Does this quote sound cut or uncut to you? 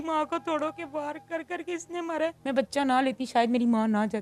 cut